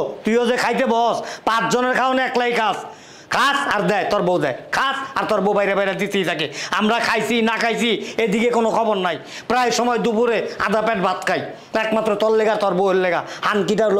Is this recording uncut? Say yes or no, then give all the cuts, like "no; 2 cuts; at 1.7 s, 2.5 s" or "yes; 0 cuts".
yes; 0 cuts